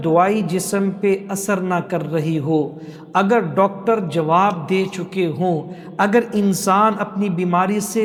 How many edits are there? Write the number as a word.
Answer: zero